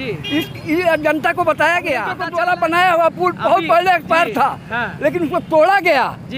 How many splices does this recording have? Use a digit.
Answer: 1